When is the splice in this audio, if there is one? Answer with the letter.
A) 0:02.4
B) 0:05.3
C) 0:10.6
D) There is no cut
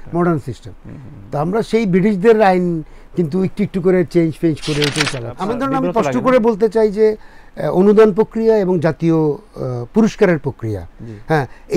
B